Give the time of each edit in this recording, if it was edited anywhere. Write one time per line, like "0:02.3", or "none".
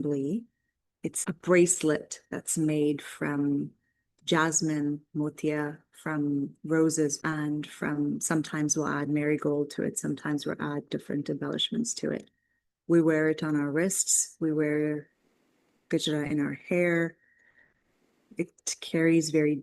0:01.2
0:07.2